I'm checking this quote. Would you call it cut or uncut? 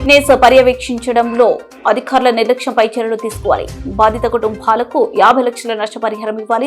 uncut